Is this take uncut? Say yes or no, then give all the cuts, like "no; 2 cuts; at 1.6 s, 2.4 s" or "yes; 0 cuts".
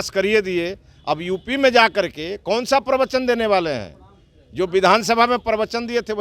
yes; 0 cuts